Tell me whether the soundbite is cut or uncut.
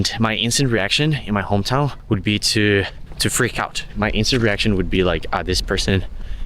cut